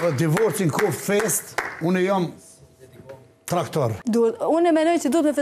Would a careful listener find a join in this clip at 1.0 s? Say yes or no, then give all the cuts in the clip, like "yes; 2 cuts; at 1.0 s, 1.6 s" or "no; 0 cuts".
no; 1 cut; at 4.0 s